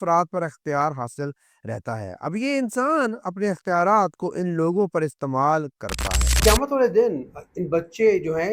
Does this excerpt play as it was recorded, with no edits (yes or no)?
no